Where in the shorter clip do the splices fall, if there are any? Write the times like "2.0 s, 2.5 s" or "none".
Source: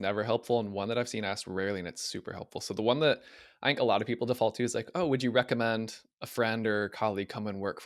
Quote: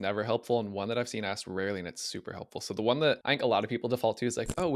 3.2 s

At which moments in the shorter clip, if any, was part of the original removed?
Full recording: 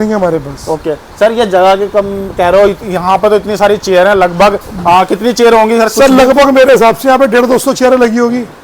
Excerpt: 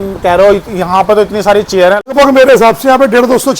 2.1 s

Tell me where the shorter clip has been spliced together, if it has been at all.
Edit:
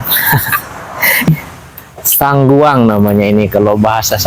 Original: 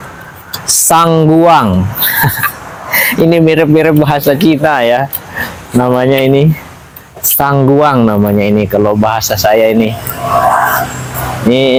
1.3 s

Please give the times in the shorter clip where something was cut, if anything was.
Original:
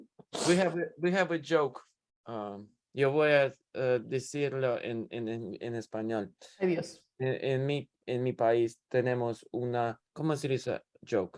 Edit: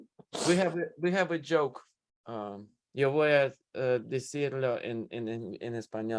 none

